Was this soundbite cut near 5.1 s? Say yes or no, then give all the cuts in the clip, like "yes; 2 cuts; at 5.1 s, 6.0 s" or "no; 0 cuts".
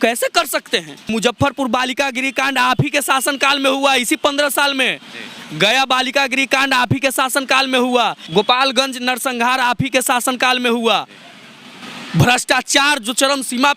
no; 2 cuts; at 1.1 s, 8.2 s